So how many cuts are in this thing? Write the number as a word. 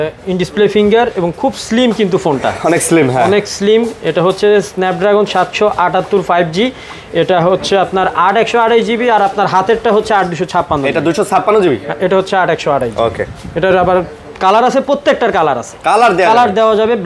zero